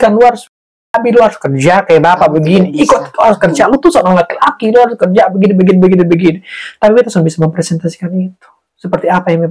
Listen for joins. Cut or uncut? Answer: uncut